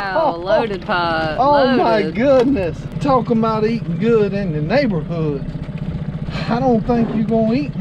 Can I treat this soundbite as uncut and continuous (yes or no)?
no